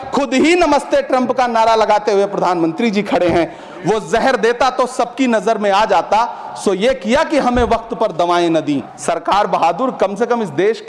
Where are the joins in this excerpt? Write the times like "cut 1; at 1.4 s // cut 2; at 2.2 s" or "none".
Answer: cut 1; at 3.6 s // cut 2; at 8.9 s